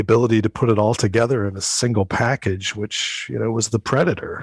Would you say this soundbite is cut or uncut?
uncut